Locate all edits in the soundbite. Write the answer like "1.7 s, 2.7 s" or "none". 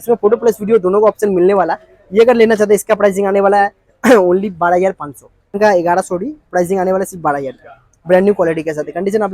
5.6 s